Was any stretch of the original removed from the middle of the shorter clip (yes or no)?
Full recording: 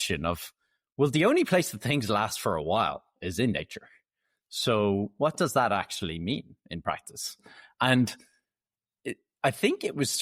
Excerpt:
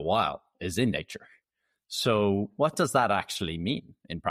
no